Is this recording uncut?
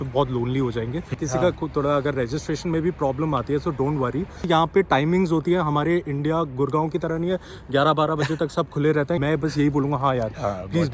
no; 3 cuts; at 1.2 s, 4.5 s, 9.2 s

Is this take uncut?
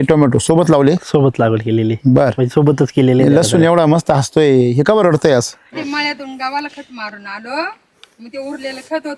no; 1 cut; at 5.7 s

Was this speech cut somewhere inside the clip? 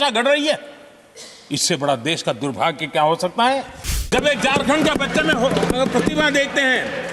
yes; 1 cut; at 4.1 s

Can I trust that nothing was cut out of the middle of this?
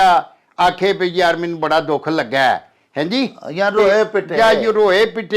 yes; 0 cuts

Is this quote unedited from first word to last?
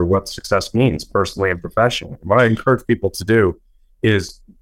yes; 0 cuts

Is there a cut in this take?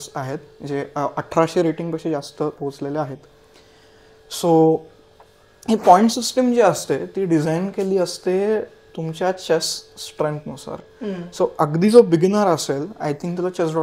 no; 0 cuts

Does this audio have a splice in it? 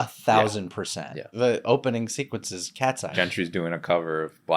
yes; 2 cuts; at 1.3 s, 3.1 s

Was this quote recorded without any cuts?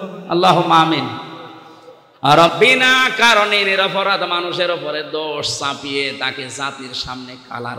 no; 1 cut; at 2.5 s

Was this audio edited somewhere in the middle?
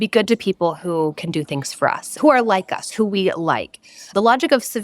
yes; 1 cut; at 3.9 s

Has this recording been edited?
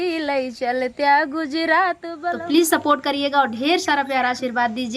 yes; 1 cut; at 2.1 s

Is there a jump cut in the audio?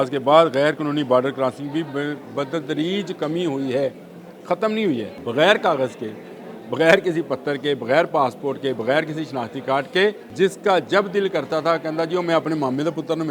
yes; 2 cuts; at 5.1 s, 10.2 s

